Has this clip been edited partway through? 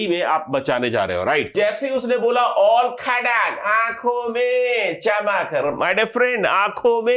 yes; 1 cut; at 1.5 s

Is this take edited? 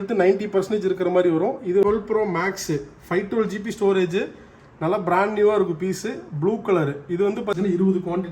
yes; 2 cuts; at 1.8 s, 7.6 s

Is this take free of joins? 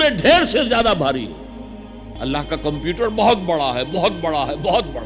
no; 1 cut; at 2.0 s

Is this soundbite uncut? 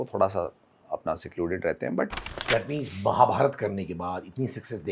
no; 1 cut; at 2.3 s

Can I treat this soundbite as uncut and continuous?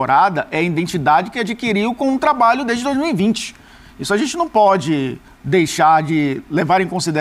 yes; 0 cuts

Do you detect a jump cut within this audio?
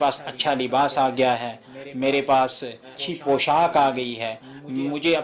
yes; 1 cut; at 2.9 s

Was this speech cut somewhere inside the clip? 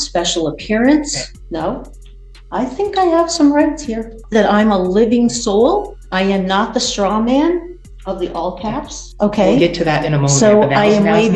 yes; 4 cuts; at 1.3 s, 4.2 s, 6.0 s, 9.1 s

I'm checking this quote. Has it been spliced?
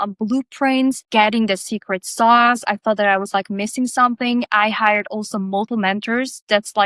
yes; 2 cuts; at 1.0 s, 5.7 s

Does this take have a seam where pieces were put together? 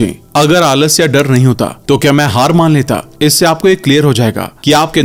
no; 0 cuts

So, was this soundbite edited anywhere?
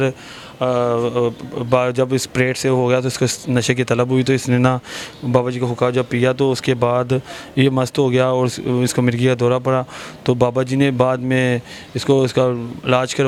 no; 0 cuts

